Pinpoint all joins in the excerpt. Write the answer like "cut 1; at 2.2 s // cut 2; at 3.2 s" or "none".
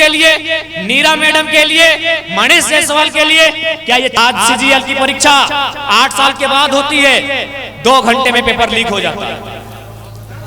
cut 1; at 4.2 s